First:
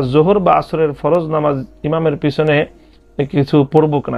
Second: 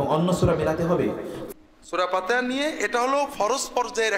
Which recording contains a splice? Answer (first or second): second